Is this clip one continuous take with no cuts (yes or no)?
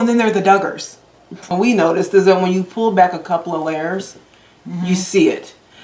no